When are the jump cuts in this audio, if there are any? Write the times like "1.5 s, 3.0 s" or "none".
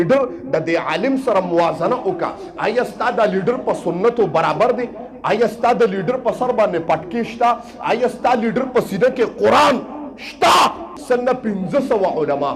10.9 s